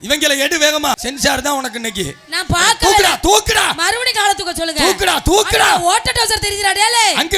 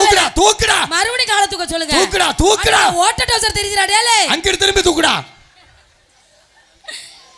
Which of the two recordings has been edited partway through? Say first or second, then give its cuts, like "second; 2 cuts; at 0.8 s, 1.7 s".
first; 1 cut; at 0.9 s